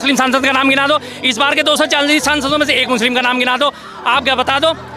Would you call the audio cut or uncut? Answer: uncut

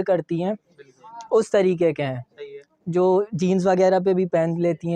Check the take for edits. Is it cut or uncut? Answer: uncut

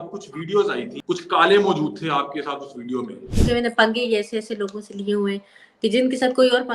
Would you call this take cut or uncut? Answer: cut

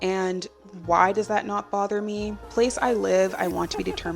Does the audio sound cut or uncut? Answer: cut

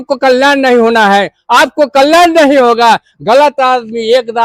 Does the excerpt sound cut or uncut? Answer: uncut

